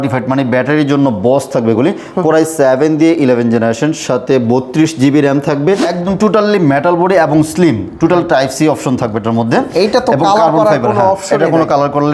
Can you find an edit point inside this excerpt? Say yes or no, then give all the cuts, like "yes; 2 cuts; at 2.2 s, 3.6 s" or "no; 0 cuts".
yes; 1 cut; at 5.9 s